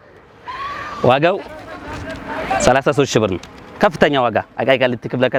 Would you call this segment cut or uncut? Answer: uncut